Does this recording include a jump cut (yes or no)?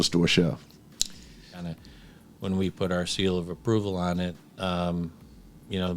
yes